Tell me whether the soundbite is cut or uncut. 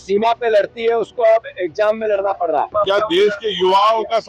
cut